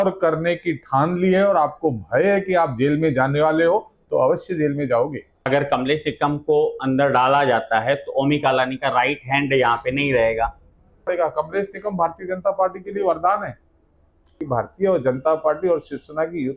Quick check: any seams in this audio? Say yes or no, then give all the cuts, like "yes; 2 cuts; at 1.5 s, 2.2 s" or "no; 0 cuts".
yes; 3 cuts; at 5.5 s, 11.1 s, 14.3 s